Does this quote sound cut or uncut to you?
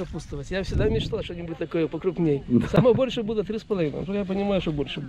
uncut